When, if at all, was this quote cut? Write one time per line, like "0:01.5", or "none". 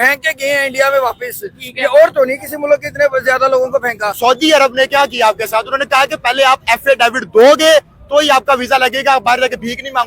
0:04.1